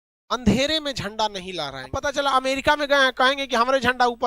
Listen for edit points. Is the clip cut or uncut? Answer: cut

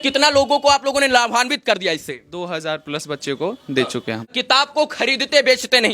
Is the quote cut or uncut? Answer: cut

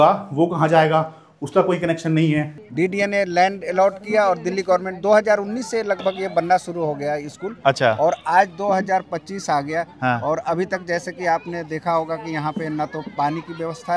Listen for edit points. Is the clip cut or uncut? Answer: cut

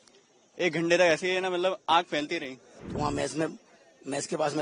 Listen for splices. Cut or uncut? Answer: cut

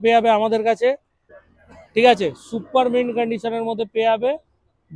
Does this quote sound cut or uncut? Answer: cut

